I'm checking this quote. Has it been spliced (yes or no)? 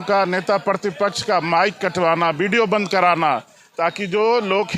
no